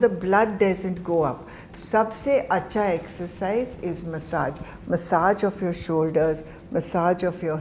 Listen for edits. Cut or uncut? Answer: cut